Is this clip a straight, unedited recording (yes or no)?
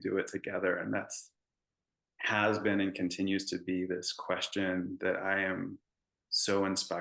yes